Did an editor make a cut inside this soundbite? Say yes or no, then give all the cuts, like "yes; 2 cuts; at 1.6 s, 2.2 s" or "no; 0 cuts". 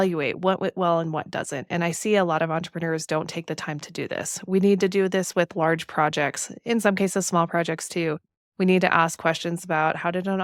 no; 0 cuts